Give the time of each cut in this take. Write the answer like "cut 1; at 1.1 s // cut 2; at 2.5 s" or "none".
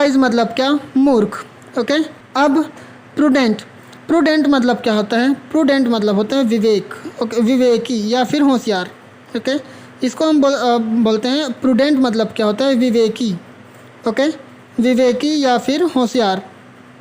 cut 1; at 2.4 s